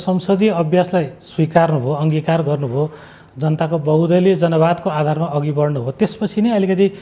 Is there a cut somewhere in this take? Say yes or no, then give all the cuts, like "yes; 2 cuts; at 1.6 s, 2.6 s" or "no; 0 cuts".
no; 0 cuts